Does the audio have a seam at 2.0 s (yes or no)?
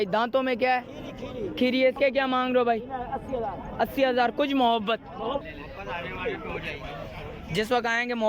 yes